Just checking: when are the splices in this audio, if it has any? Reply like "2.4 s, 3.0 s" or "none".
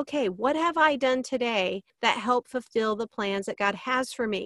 1.9 s